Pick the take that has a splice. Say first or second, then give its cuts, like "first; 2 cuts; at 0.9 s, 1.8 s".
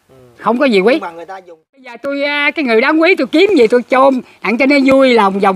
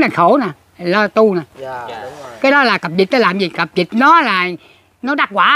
first; 1 cut; at 1.9 s